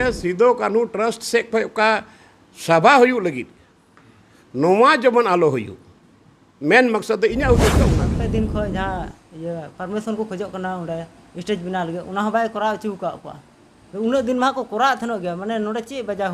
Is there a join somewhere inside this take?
yes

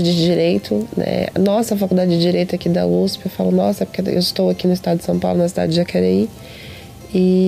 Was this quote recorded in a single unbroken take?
yes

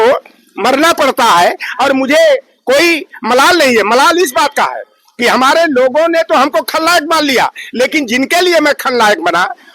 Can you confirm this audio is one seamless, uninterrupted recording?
yes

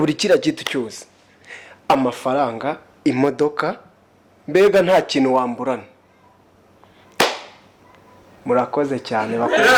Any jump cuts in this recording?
no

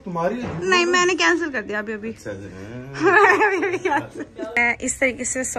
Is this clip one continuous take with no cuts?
no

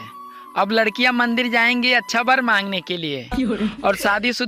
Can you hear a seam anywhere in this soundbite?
no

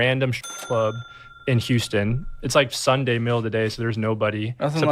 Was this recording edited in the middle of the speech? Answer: yes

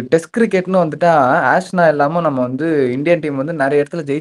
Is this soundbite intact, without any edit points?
yes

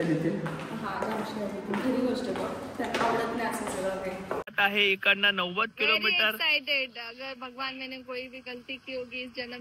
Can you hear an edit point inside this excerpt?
yes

